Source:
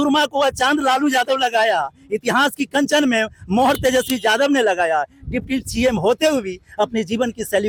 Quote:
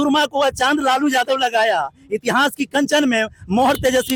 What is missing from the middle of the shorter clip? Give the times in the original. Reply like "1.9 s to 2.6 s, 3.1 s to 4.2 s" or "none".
none